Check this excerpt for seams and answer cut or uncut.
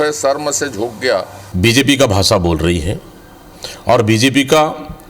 cut